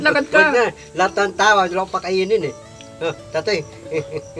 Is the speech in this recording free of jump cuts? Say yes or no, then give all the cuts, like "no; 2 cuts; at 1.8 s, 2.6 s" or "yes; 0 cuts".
yes; 0 cuts